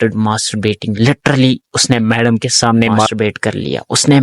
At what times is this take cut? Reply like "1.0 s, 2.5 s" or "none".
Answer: 3.1 s